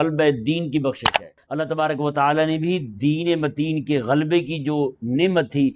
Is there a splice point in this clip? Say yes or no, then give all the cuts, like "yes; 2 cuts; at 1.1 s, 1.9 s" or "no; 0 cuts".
yes; 1 cut; at 1.4 s